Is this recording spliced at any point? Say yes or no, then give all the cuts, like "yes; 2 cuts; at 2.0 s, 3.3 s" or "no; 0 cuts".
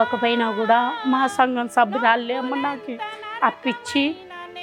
no; 0 cuts